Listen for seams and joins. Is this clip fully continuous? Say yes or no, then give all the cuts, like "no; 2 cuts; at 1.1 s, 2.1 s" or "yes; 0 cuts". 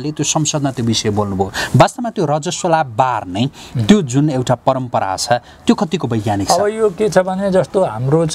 yes; 0 cuts